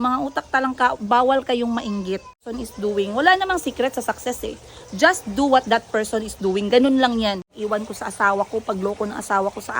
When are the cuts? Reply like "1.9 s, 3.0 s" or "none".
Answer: 2.5 s, 7.5 s